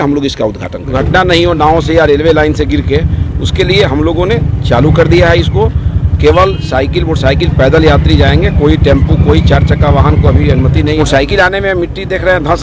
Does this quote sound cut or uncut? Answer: cut